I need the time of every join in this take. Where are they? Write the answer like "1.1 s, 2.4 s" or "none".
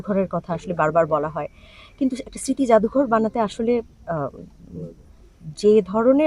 none